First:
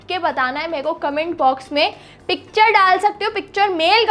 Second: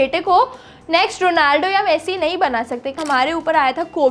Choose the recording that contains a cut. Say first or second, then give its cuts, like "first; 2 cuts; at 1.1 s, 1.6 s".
second; 1 cut; at 3.0 s